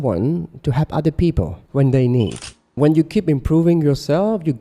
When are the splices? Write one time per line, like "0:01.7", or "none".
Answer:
0:01.6
0:02.7